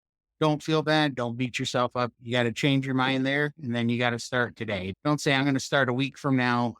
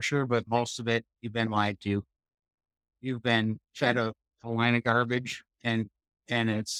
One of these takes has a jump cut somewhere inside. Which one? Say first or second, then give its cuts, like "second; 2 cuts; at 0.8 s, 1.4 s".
first; 2 cuts; at 2.1 s, 4.9 s